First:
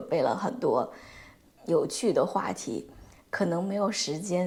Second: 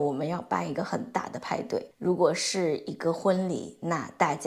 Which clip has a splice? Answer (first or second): second